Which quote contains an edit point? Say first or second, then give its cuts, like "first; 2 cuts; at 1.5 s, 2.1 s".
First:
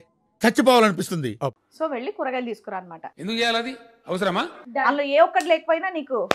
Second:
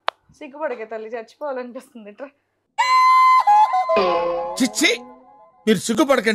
first; 2 cuts; at 1.6 s, 4.6 s